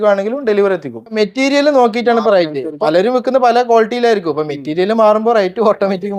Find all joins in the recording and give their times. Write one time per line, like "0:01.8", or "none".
0:01.2
0:02.7